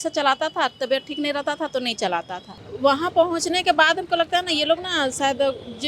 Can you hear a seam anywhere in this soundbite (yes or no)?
yes